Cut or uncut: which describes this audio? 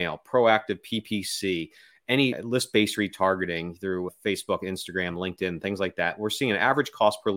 cut